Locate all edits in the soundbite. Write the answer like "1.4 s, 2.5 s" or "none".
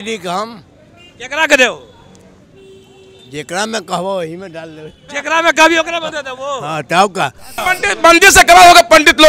7.6 s